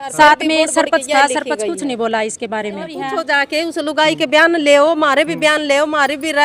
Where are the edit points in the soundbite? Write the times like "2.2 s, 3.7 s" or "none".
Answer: 3.1 s